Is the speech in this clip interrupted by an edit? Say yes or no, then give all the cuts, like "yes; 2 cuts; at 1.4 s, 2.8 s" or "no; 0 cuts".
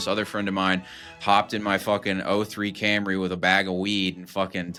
no; 0 cuts